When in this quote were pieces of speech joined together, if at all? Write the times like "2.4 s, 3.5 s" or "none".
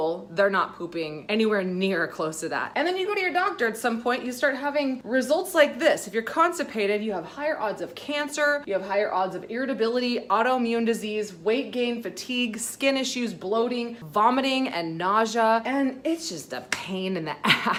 none